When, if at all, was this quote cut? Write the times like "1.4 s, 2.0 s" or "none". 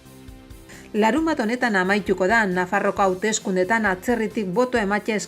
0.9 s